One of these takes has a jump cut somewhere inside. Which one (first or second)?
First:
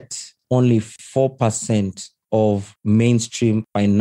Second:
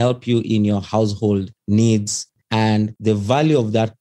second